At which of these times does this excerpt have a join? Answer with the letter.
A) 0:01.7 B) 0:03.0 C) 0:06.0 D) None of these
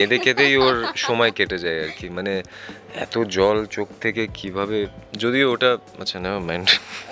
D